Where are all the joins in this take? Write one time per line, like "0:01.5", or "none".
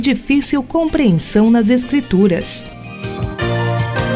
0:02.6